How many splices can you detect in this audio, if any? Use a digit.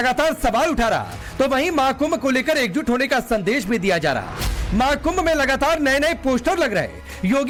0